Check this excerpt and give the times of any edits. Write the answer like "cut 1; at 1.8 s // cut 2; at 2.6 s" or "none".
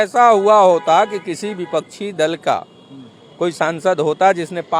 none